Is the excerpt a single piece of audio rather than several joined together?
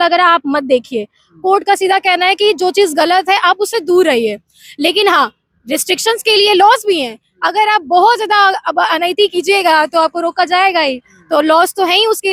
yes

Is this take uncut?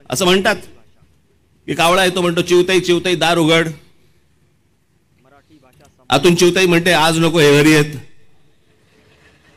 yes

